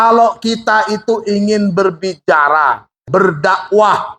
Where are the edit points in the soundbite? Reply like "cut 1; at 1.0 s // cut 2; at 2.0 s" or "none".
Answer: cut 1; at 3.0 s